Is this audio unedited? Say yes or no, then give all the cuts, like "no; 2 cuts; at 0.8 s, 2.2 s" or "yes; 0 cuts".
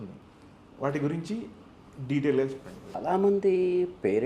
no; 1 cut; at 2.9 s